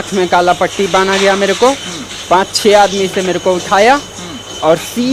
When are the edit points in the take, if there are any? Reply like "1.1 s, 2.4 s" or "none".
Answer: none